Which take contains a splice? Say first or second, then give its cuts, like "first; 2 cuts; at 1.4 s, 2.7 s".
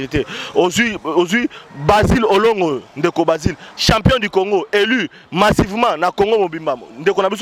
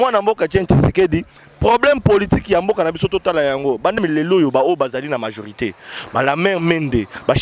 second; 1 cut; at 4.0 s